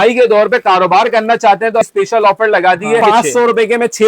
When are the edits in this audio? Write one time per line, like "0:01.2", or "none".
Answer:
0:01.8
0:03.0